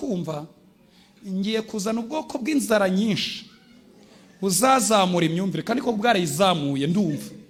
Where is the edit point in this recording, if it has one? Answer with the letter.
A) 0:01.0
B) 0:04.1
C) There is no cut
C